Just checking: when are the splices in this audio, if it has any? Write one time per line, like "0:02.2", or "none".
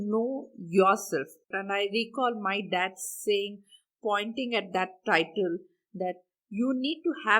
0:01.5